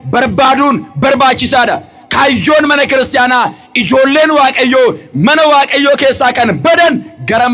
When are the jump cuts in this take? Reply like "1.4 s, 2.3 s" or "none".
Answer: none